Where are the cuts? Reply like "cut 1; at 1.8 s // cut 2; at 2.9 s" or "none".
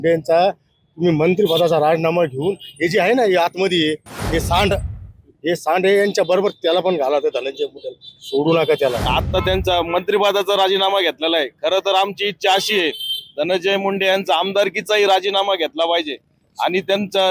cut 1; at 9.1 s